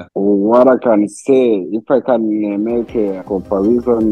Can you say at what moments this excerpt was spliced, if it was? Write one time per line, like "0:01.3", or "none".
0:01.7
0:03.2